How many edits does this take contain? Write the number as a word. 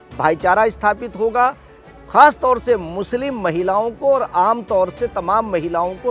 zero